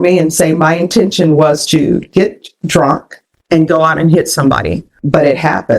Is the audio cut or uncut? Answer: cut